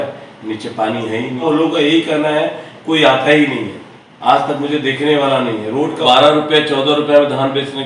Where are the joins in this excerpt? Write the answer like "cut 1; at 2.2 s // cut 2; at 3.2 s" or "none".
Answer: cut 1; at 1.4 s // cut 2; at 6.0 s